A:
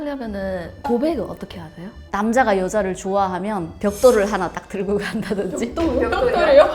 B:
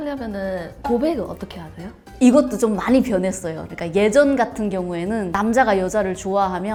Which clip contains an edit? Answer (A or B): A